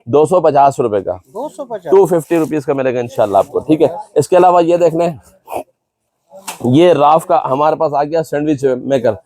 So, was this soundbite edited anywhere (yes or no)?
no